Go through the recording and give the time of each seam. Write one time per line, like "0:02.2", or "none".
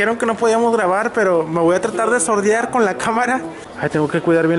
0:03.6